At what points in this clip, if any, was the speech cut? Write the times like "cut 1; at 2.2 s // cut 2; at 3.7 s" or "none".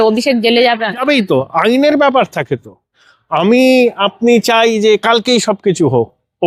none